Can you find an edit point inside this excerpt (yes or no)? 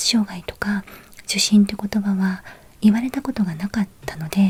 no